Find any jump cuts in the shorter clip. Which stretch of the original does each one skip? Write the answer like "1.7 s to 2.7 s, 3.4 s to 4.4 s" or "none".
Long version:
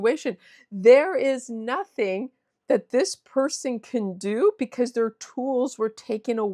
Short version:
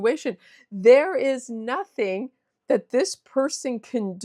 none

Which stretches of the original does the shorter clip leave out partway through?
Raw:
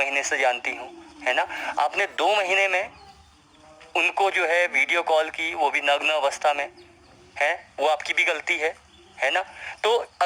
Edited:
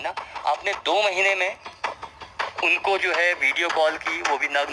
none

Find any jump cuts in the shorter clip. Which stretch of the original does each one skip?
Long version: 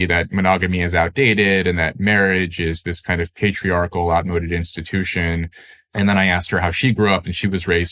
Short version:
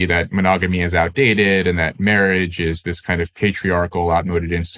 none

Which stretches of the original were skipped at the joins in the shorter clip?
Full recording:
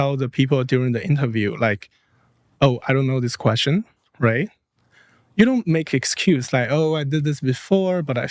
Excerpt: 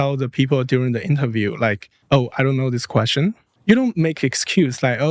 1.9 s to 2.4 s, 4.0 s to 5.2 s

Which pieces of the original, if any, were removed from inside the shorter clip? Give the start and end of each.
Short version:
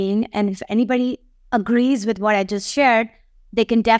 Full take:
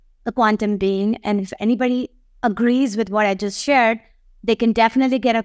none

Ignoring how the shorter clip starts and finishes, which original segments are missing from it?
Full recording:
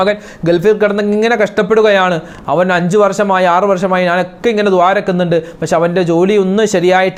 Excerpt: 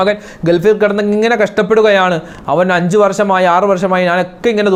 none

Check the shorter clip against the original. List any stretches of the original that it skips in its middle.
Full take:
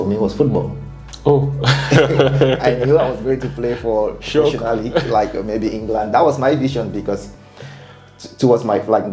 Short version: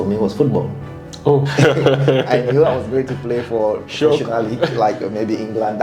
1.5 s to 1.8 s

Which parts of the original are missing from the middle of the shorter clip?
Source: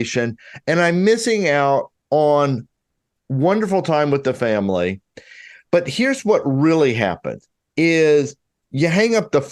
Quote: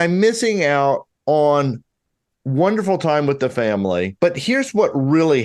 5.0 s to 5.6 s

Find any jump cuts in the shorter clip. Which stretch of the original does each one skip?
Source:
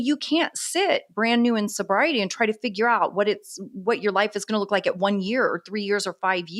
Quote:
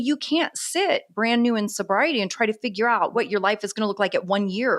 3.1 s to 3.8 s

